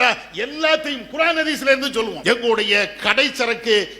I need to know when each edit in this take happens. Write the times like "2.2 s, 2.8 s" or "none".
2.1 s